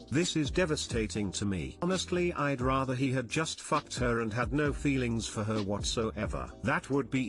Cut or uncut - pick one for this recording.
cut